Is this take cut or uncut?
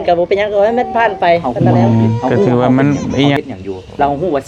cut